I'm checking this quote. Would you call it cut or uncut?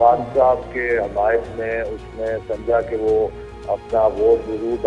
uncut